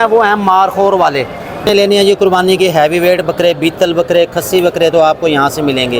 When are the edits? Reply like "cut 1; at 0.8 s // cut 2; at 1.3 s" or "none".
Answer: cut 1; at 1.6 s